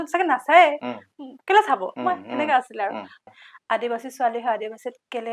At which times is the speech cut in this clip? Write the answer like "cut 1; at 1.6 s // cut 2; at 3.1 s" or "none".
cut 1; at 3.2 s